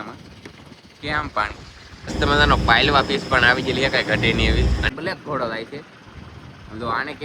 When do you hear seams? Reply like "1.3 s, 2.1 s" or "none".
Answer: 2.1 s, 4.9 s